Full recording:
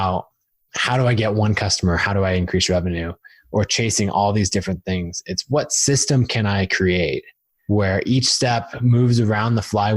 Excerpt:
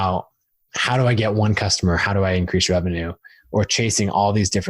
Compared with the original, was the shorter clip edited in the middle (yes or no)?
no